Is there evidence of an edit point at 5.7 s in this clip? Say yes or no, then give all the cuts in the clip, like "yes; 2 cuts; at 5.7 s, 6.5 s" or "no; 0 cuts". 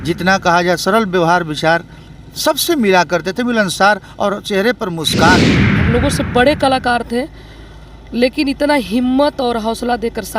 yes; 1 cut; at 5.7 s